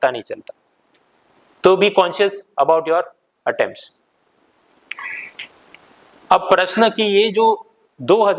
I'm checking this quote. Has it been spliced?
no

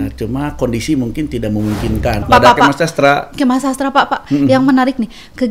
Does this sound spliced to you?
yes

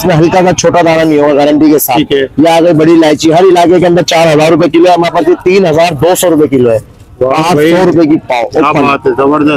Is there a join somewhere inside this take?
no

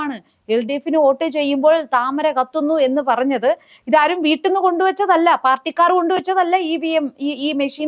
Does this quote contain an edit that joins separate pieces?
no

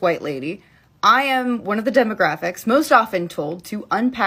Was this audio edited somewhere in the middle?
no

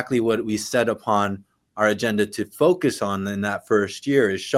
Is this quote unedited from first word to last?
yes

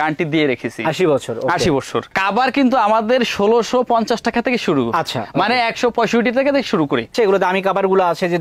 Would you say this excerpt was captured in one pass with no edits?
no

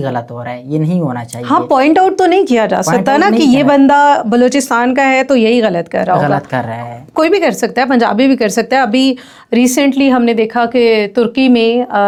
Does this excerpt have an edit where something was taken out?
no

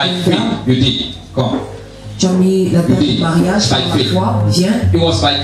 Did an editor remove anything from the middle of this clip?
no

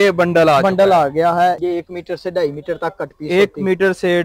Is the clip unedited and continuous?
no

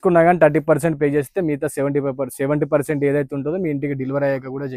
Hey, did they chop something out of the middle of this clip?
no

